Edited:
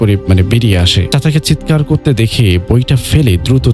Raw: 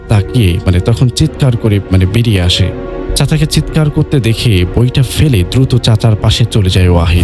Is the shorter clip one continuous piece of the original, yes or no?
no